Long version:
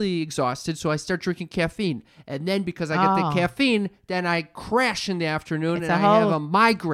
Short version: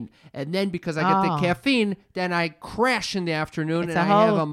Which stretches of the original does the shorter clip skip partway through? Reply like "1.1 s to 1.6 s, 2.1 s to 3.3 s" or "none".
none